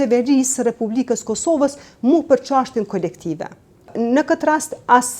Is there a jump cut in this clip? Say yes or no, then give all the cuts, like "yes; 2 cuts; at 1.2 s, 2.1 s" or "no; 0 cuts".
yes; 1 cut; at 3.9 s